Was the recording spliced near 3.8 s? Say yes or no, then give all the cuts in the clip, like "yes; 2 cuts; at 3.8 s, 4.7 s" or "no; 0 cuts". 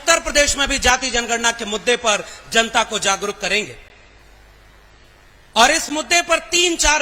no; 0 cuts